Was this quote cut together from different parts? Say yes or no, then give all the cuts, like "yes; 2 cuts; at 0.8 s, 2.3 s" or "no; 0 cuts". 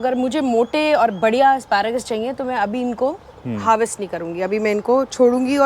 no; 0 cuts